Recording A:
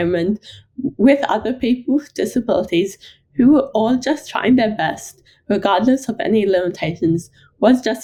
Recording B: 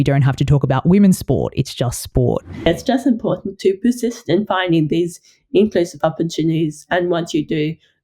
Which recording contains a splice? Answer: B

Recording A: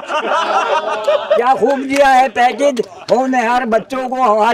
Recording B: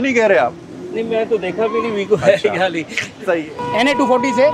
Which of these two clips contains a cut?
B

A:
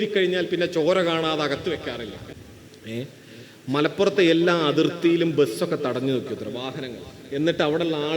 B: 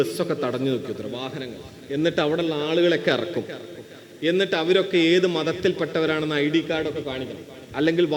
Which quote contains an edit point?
A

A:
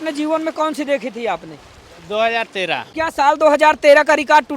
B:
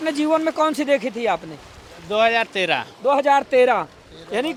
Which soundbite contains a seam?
A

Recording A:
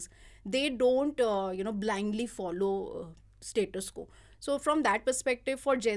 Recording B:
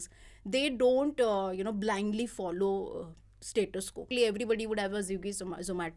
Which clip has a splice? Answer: B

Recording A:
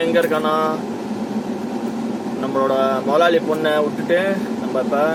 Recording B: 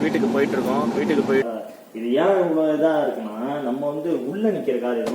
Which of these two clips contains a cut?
B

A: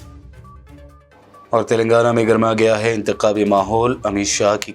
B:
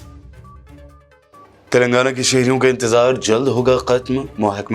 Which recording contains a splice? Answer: B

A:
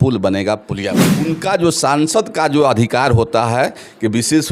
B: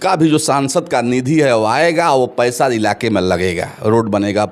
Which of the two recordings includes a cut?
A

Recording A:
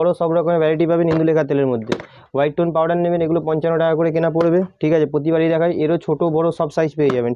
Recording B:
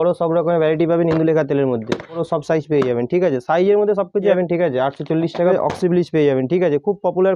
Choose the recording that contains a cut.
B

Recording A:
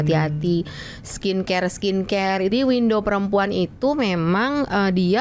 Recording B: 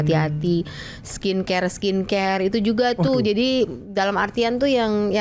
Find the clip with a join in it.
A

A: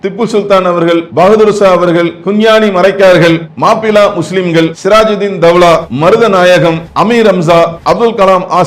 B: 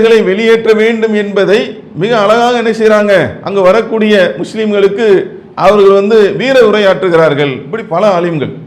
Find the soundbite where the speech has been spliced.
A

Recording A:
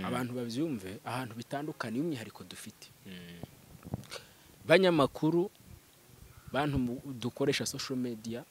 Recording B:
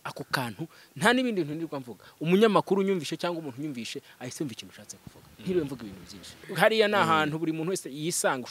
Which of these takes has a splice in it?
B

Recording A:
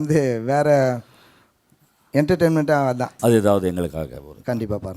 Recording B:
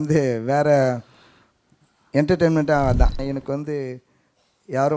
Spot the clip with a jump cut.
B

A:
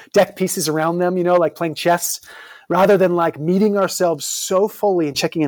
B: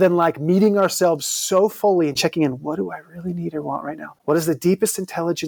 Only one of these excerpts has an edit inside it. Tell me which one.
B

